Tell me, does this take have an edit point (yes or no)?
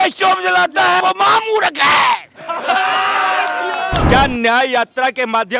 yes